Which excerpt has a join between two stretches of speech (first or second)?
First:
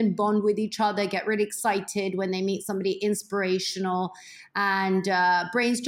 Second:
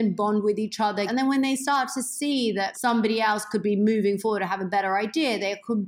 second